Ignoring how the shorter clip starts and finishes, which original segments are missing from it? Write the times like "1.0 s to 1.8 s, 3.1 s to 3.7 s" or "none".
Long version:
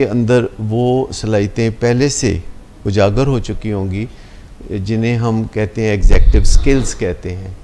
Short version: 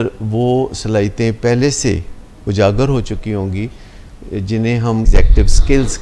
5.5 s to 6.1 s